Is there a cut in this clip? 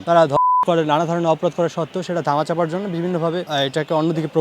yes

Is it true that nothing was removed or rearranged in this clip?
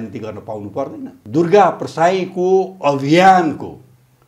no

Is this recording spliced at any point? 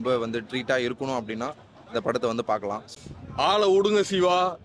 yes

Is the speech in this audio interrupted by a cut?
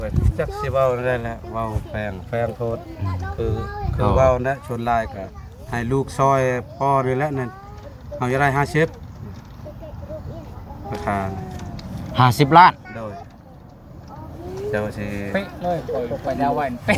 no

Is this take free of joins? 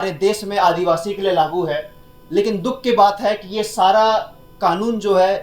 yes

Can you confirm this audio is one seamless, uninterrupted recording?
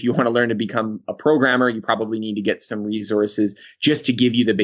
yes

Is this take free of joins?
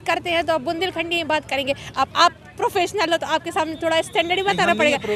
yes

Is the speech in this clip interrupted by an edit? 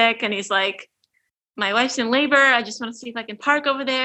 no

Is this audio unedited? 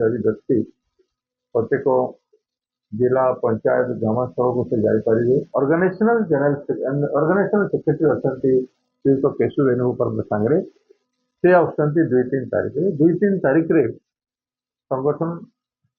no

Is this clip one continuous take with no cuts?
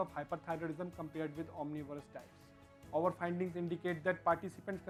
yes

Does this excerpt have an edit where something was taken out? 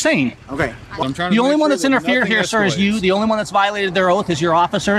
yes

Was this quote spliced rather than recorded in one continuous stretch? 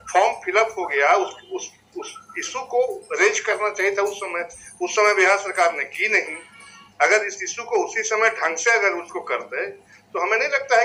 no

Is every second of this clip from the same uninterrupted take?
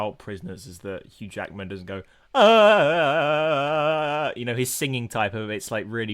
yes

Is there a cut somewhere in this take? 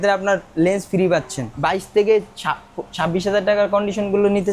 yes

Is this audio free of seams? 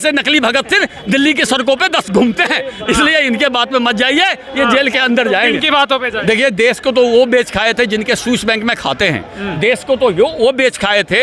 no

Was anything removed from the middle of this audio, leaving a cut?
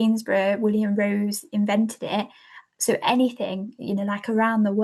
no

